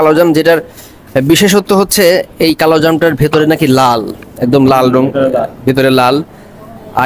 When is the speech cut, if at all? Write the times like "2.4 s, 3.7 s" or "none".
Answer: none